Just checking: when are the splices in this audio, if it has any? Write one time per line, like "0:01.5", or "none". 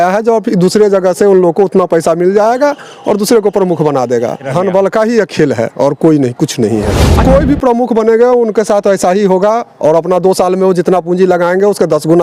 0:04.5
0:07.2